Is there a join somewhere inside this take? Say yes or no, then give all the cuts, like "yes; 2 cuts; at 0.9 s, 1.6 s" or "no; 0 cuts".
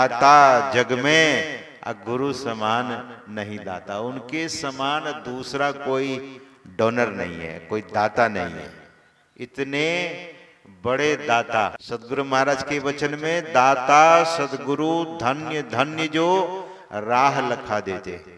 yes; 1 cut; at 11.8 s